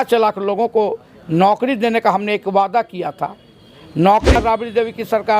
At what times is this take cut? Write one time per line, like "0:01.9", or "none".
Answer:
0:04.3